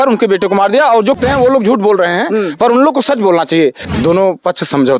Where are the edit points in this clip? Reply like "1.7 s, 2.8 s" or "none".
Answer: 1.2 s, 3.8 s